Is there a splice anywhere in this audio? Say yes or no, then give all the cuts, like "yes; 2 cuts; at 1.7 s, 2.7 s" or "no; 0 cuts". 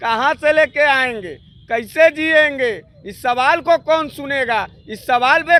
no; 0 cuts